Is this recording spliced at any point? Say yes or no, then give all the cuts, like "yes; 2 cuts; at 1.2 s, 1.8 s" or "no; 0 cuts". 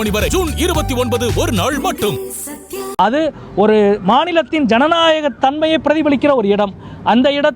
yes; 1 cut; at 2.8 s